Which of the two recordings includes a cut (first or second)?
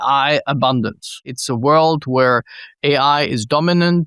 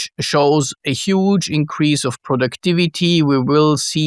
first